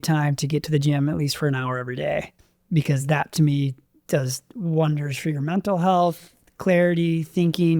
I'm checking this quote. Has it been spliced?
yes; 1 cut; at 2.4 s

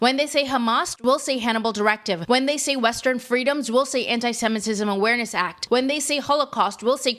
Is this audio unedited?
no; 2 cuts; at 2.2 s, 5.5 s

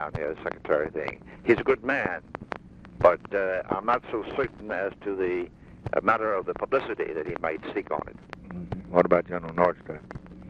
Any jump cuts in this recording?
no; 0 cuts

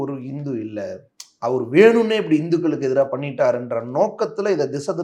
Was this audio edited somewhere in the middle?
no; 0 cuts

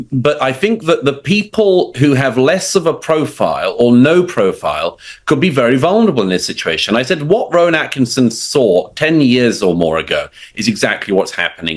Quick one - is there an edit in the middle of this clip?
no; 0 cuts

